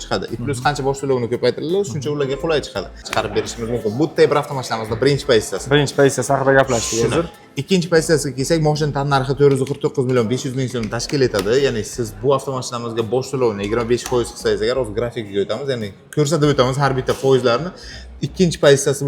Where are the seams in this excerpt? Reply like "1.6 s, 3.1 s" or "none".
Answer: 3.0 s